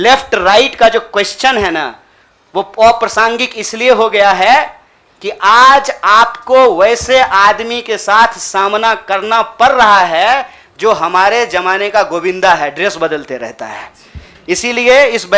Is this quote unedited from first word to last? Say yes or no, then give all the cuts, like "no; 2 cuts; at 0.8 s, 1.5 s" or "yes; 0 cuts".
yes; 0 cuts